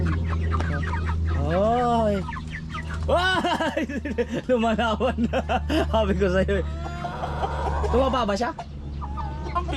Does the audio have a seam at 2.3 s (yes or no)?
no